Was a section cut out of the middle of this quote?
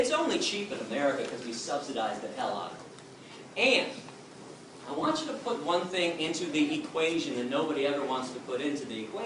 no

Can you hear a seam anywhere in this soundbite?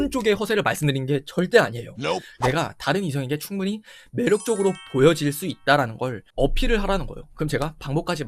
yes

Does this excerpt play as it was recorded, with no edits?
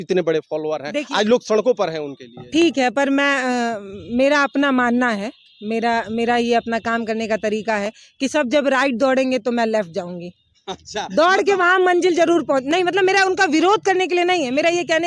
yes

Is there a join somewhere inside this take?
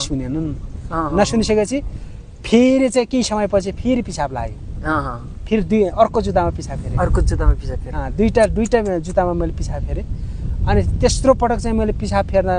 no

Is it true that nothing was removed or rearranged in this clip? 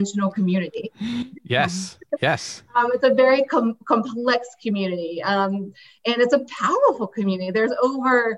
yes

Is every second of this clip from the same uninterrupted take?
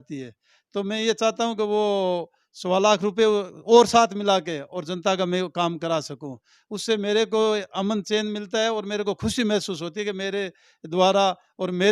yes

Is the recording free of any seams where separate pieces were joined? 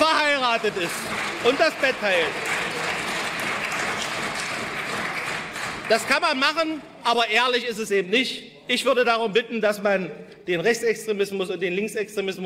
yes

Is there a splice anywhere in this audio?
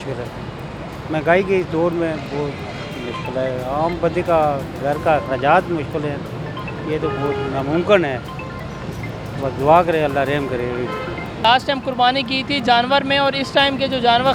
no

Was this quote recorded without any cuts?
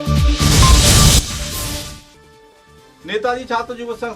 no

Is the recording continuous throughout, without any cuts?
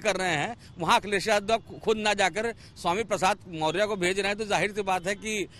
yes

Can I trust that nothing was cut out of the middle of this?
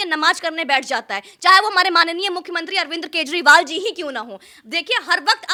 yes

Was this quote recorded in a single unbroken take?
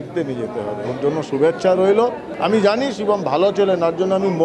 no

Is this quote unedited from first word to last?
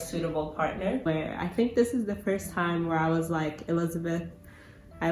no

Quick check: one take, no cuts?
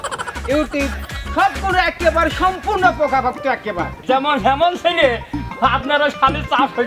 no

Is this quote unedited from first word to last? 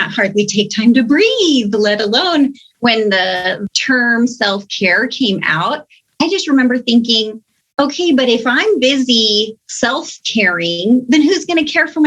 no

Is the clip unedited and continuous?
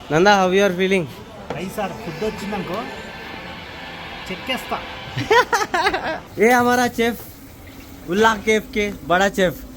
no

